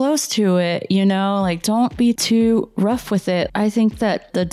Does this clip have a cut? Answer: yes; 2 cuts; at 1.9 s, 3.5 s

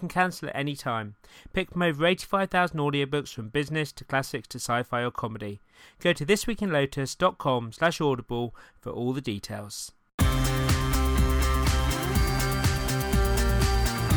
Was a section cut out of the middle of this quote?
yes; 1 cut; at 10.1 s

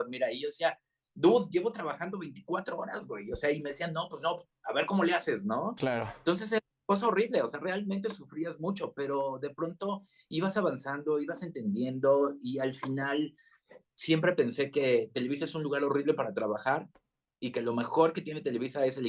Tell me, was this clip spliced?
no; 0 cuts

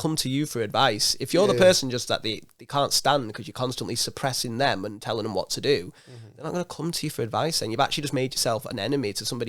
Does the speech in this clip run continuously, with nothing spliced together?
yes; 0 cuts

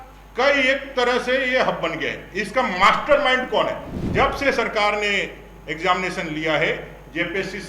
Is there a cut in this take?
yes; 1 cut; at 3.9 s

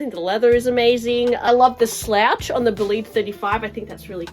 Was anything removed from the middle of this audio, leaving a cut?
yes; 1 cut; at 1.4 s

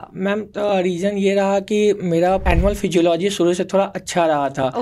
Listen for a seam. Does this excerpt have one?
yes; 1 cut; at 2.4 s

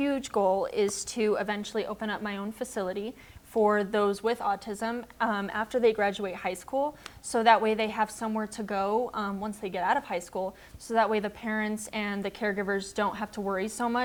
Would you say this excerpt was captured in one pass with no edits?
yes; 0 cuts

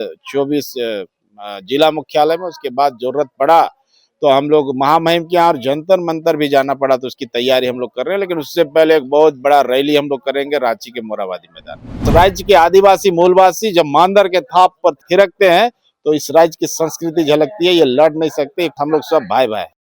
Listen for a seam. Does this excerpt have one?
yes; 2 cuts; at 12.0 s, 18.8 s

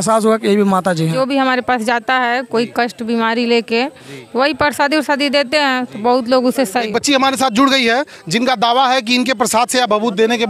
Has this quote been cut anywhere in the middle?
yes; 2 cuts; at 1.1 s, 6.9 s

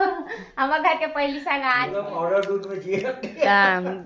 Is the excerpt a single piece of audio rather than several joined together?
no; 1 cut; at 1.9 s

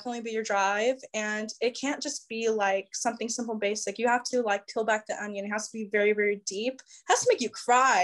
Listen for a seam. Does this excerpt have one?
no; 0 cuts

